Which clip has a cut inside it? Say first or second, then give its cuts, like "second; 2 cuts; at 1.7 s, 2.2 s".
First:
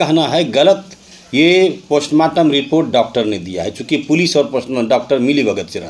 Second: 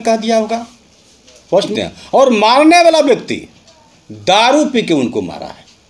second; 1 cut; at 1.7 s